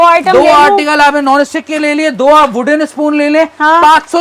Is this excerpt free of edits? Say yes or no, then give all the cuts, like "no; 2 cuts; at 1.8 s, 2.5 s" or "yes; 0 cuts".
yes; 0 cuts